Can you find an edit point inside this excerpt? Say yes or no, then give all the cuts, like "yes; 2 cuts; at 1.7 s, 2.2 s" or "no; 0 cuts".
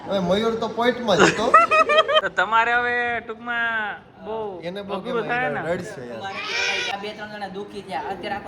yes; 2 cuts; at 2.2 s, 6.9 s